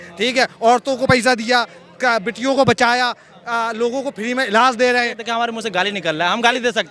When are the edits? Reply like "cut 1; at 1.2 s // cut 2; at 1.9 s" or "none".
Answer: cut 1; at 5.2 s